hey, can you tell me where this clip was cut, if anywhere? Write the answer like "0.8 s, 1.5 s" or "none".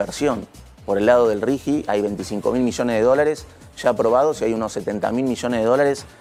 none